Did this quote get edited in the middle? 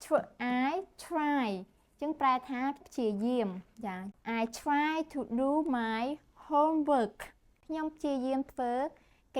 yes; 2 cuts; at 4.1 s, 7.6 s

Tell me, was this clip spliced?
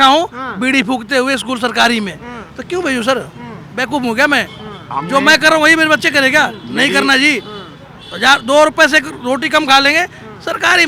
no; 0 cuts

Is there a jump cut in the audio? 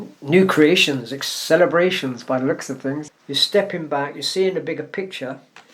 yes; 1 cut; at 3.0 s

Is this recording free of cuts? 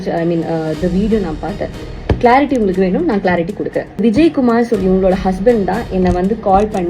no; 1 cut; at 4.0 s

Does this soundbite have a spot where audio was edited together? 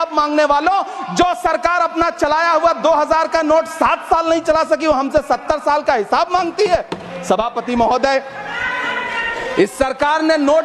no; 0 cuts

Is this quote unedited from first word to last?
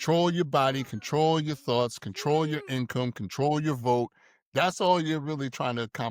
yes; 0 cuts

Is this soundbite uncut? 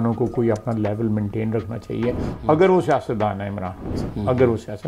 yes; 0 cuts

